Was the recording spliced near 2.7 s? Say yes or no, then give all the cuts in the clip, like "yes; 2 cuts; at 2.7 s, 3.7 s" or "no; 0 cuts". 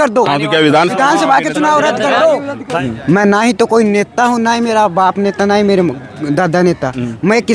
yes; 1 cut; at 2.7 s